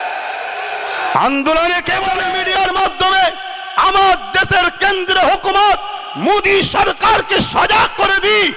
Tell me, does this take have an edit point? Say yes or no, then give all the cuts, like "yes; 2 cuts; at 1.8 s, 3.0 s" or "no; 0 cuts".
yes; 1 cut; at 2.2 s